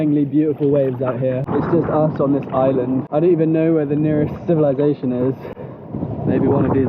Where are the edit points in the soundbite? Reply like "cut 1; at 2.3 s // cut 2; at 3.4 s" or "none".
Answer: cut 1; at 1.5 s // cut 2; at 3.1 s